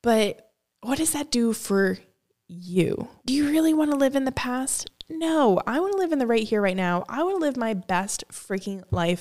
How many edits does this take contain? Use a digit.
1